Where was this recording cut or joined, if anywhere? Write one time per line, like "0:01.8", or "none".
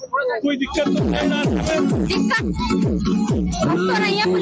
none